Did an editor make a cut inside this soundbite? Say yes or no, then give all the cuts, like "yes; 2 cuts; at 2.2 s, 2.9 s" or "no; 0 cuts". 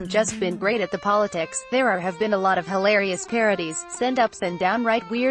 no; 0 cuts